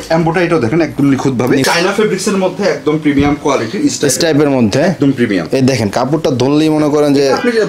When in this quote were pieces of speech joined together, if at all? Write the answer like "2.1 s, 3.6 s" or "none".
1.6 s